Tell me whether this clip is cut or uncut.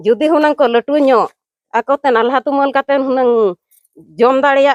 uncut